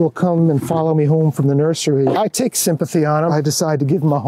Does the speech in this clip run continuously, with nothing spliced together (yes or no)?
no